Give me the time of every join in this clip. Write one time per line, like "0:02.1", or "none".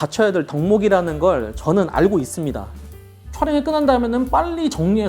0:02.9